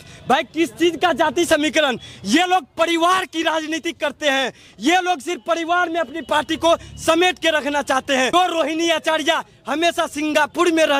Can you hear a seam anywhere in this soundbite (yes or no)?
yes